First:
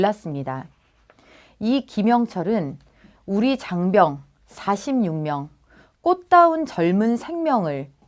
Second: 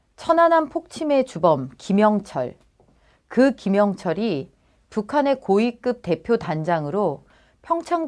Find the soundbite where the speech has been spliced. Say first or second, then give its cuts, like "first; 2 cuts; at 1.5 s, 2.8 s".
first; 1 cut; at 2.8 s